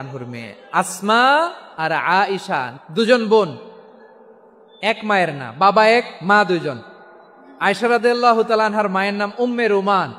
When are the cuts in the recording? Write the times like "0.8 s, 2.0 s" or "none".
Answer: 1.6 s, 2.7 s